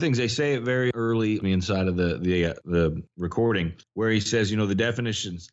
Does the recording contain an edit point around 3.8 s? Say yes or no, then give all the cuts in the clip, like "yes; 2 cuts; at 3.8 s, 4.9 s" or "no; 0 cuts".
yes; 3 cuts; at 1.0 s, 2.8 s, 3.8 s